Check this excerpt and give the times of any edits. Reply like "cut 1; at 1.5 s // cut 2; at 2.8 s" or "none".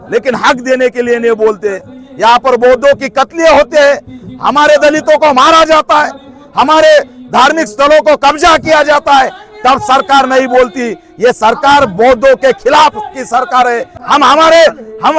cut 1; at 13.9 s